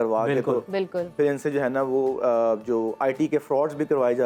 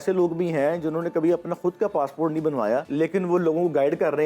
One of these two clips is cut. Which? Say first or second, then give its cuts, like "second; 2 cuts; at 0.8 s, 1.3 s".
second; 1 cut; at 2.9 s